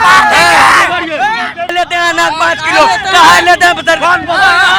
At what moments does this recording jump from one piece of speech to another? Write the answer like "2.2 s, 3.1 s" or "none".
1.7 s